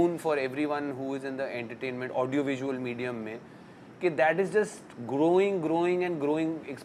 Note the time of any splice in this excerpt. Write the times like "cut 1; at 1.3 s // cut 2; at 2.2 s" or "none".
none